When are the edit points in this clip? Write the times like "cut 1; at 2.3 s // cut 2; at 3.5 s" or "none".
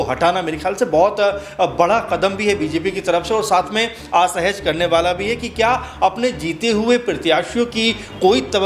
none